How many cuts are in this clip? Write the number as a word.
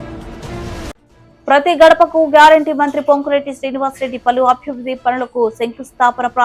one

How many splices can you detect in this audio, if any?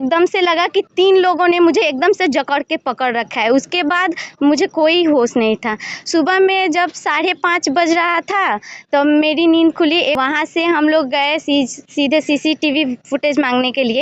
one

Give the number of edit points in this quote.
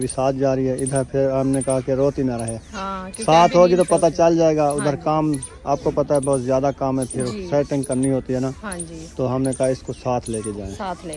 zero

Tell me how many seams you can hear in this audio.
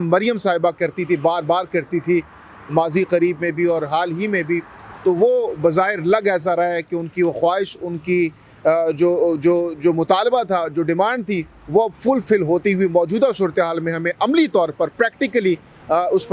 zero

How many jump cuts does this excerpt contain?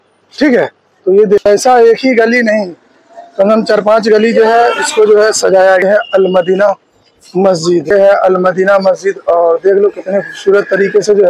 three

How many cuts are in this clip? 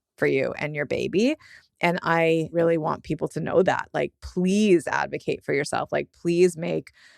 one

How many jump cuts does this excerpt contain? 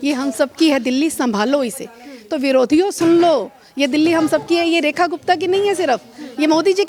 zero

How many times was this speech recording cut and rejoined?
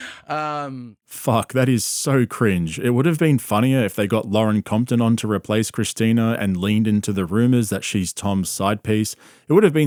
zero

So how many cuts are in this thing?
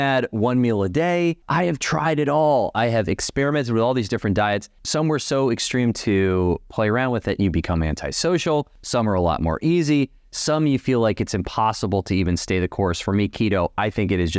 three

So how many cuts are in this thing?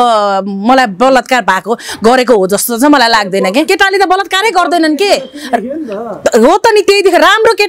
one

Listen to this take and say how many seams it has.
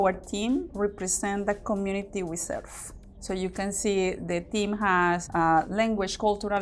zero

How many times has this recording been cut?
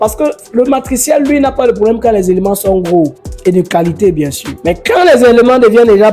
two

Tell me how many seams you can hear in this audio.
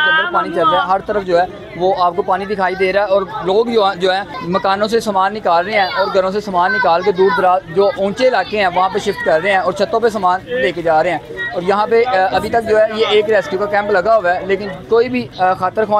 zero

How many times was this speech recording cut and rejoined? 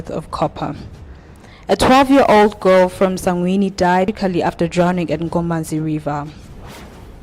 one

